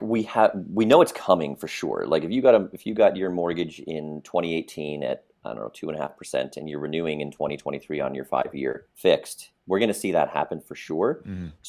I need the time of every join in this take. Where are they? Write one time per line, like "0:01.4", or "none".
0:08.9